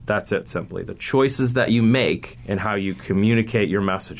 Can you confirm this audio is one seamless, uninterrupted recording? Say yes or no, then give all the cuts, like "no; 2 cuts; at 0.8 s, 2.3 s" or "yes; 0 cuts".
no; 1 cut; at 2.3 s